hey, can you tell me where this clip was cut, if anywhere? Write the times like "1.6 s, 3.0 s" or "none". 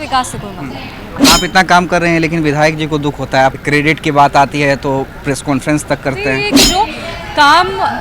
1.2 s, 3.6 s, 6.5 s